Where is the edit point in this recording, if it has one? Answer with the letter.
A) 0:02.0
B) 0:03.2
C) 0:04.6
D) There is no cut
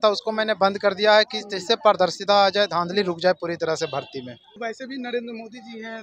C